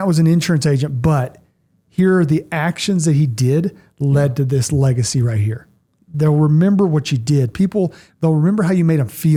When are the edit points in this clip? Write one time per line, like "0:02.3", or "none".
none